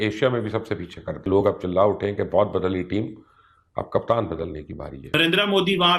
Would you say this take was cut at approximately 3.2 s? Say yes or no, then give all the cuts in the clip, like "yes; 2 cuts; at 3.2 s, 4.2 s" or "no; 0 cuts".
no; 2 cuts; at 1.2 s, 5.1 s